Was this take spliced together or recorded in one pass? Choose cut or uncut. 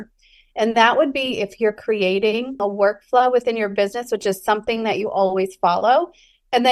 cut